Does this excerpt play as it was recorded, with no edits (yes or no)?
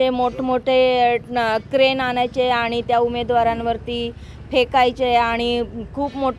yes